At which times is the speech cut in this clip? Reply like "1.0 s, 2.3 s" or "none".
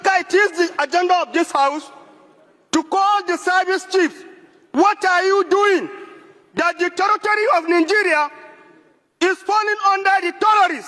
none